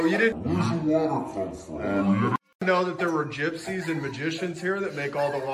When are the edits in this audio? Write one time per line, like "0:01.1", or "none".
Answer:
0:02.5